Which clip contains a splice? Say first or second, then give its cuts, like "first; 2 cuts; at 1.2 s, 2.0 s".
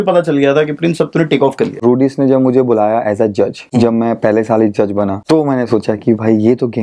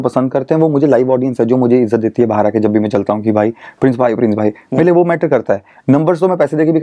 first; 3 cuts; at 1.8 s, 3.6 s, 5.2 s